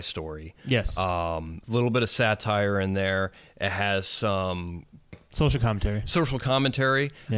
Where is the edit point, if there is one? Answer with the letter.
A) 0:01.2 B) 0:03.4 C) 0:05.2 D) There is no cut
C